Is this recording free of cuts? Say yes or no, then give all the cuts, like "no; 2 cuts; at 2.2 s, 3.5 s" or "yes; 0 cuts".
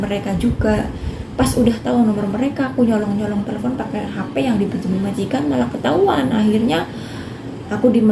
yes; 0 cuts